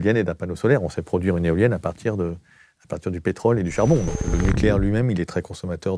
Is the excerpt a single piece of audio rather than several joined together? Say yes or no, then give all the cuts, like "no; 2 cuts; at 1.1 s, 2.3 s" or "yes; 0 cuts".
no; 1 cut; at 4.2 s